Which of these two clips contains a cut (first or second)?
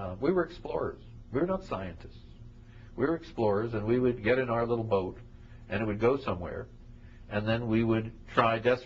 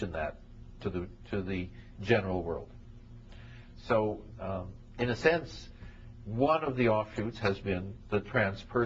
first